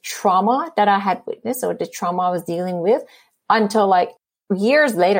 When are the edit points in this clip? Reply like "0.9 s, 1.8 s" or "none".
none

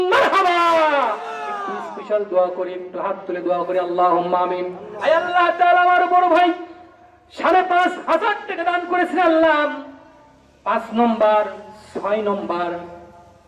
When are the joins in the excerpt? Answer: none

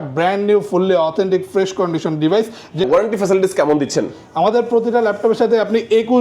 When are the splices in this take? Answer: 2.8 s

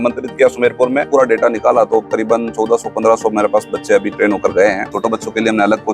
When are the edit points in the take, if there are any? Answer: 1.0 s, 4.9 s

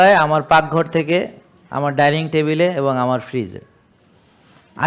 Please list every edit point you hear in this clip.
none

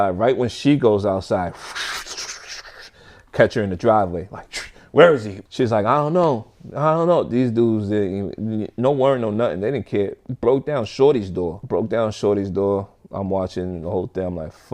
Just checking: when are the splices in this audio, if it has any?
5.3 s

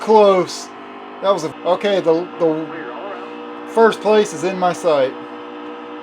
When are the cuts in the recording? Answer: 1.5 s

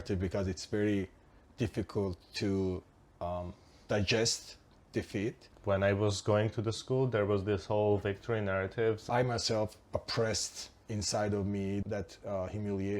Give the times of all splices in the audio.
5.5 s, 9.1 s, 11.8 s

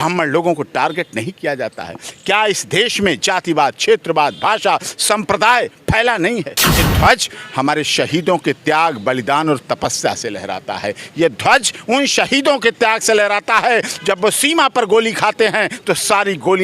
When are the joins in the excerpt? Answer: 6.8 s

